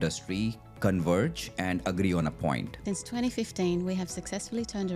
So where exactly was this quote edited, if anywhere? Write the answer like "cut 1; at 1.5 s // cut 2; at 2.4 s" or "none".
cut 1; at 3.1 s